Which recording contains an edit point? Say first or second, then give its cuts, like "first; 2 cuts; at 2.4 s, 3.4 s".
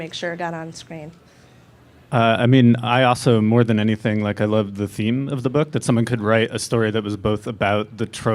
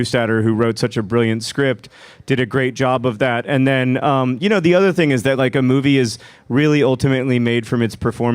second; 1 cut; at 3.4 s